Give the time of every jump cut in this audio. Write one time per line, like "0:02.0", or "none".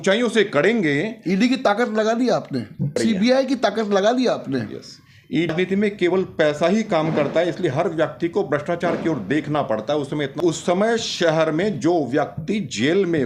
0:02.9
0:05.5
0:10.4